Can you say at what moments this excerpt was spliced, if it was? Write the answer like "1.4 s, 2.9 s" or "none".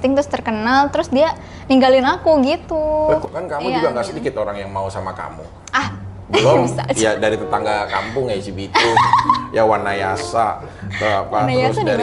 3.2 s